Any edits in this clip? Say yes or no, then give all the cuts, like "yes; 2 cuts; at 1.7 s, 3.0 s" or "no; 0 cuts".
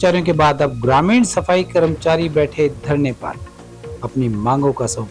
no; 0 cuts